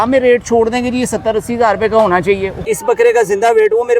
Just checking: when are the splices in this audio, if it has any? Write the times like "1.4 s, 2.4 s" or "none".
2.5 s